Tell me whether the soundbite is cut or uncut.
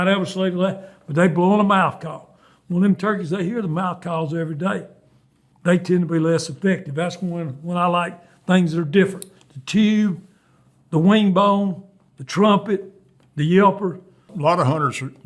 cut